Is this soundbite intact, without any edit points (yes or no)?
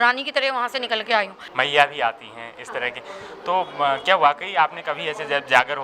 no